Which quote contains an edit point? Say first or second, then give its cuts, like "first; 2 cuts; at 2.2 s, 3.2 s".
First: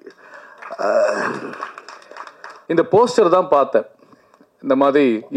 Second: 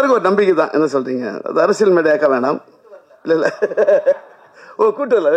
first; 1 cut; at 2.6 s